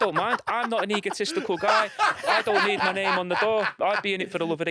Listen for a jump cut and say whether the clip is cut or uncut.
cut